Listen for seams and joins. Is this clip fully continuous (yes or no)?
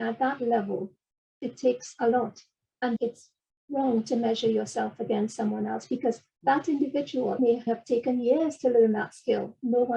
no